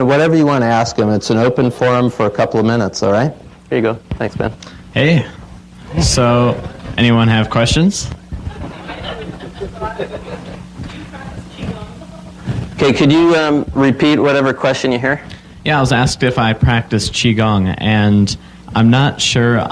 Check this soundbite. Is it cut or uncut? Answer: cut